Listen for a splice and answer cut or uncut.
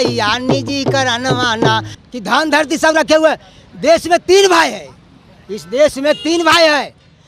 cut